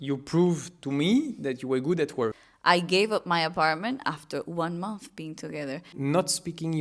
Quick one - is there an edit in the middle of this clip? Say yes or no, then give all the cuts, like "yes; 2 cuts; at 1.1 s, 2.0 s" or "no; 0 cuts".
yes; 2 cuts; at 2.5 s, 5.9 s